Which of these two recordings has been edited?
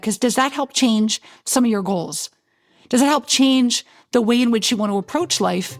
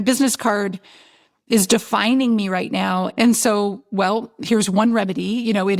second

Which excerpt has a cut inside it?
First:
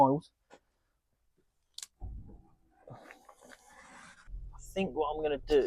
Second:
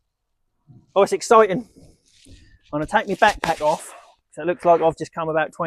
first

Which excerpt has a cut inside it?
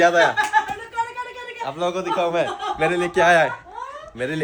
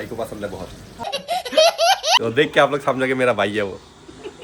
second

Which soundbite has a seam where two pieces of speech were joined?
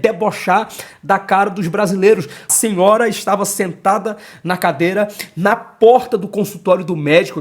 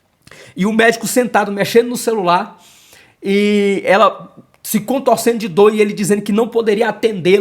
first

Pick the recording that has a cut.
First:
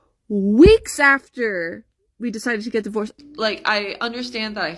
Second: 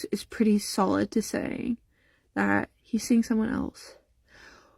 first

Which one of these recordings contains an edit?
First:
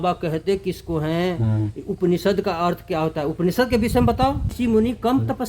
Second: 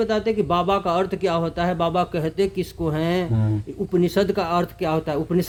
first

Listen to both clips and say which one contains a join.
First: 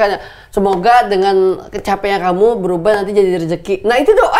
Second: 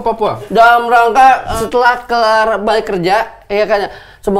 second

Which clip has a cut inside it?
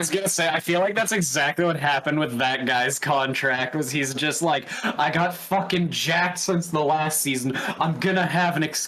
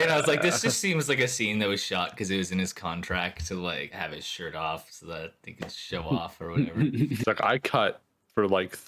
second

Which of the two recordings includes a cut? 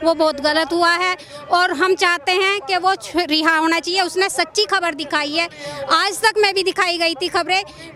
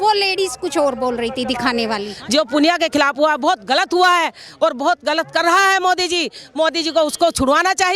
second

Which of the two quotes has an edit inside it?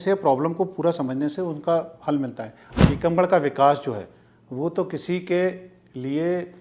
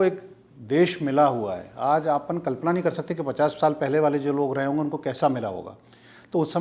first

